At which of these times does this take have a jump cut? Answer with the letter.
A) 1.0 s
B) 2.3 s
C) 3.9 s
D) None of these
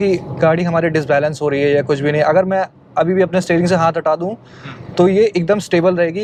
D